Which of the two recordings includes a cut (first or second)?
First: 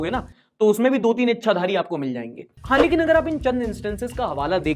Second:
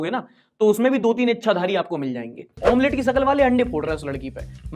second